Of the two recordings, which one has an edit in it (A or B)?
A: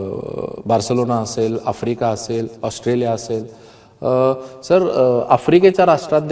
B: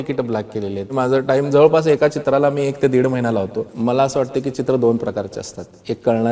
B